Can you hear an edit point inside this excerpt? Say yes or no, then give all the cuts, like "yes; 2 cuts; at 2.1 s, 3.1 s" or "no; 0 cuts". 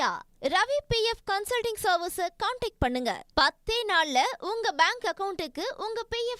no; 0 cuts